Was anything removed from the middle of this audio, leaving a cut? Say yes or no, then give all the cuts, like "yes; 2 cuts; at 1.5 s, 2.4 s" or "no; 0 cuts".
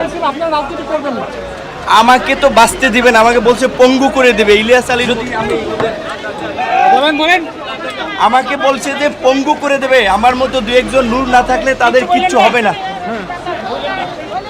yes; 1 cut; at 5.0 s